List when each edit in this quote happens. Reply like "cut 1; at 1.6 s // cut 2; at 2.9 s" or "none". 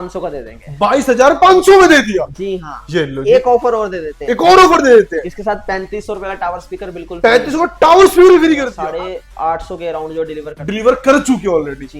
cut 1; at 8.7 s